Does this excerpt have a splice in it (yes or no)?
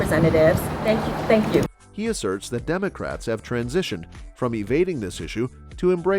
no